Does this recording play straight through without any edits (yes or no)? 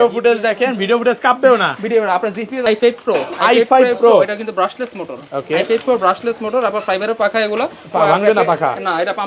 no